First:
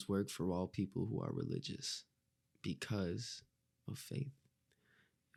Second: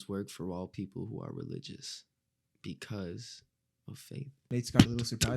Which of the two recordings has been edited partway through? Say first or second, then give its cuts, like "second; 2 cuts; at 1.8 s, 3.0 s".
second; 1 cut; at 4.3 s